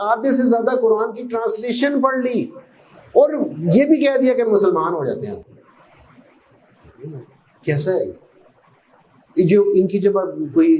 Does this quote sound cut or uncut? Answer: uncut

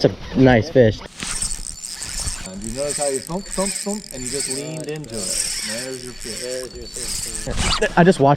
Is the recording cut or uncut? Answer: cut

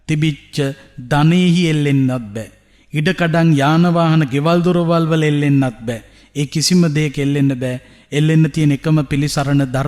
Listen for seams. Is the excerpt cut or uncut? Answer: uncut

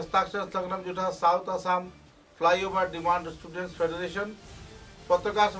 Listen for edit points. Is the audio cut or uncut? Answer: uncut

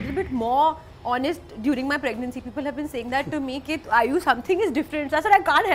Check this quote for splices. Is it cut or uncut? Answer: uncut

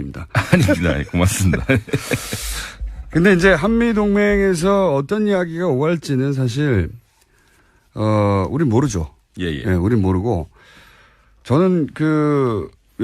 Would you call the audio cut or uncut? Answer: cut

